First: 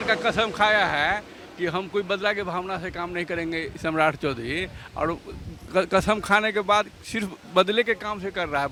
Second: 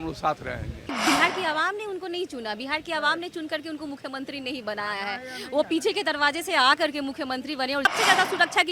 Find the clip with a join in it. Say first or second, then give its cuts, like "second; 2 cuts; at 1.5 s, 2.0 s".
second; 2 cuts; at 0.9 s, 7.9 s